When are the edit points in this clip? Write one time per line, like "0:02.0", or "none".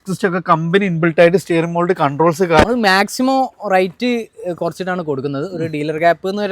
0:02.7